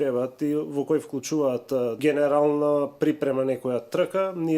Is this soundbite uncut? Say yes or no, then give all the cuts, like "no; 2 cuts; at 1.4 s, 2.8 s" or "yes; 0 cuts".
no; 1 cut; at 1.9 s